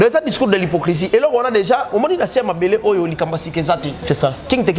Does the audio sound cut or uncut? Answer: uncut